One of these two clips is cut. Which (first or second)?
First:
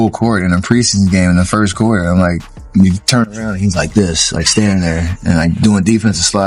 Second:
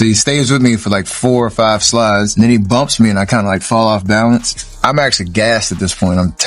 second